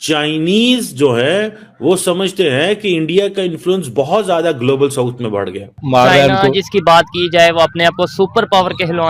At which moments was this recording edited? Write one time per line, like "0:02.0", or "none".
0:05.8